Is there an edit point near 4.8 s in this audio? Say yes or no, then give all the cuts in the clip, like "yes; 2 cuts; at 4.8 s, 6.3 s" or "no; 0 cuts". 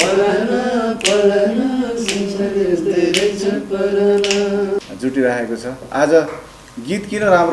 yes; 1 cut; at 4.8 s